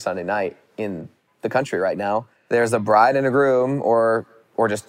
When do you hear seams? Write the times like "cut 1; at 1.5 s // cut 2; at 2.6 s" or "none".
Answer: cut 1; at 2.3 s